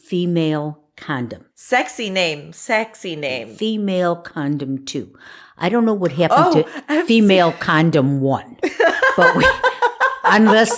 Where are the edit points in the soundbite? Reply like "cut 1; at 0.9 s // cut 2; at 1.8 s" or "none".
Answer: cut 1; at 1.6 s // cut 2; at 3.5 s